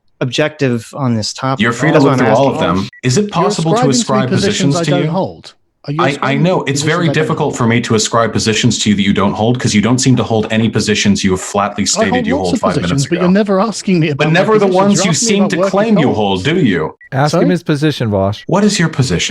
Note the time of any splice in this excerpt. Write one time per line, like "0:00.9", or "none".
0:02.9
0:17.0
0:18.4